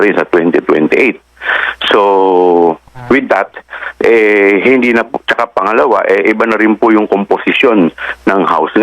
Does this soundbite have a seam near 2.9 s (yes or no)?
yes